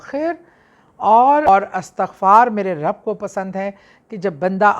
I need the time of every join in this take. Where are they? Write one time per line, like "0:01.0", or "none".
0:01.5